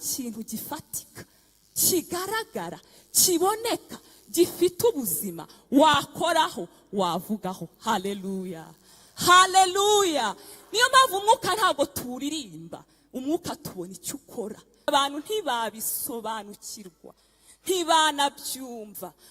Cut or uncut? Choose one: cut